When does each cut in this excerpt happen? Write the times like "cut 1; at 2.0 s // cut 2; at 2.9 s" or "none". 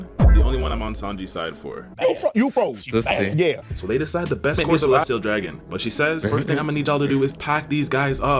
cut 1; at 4.7 s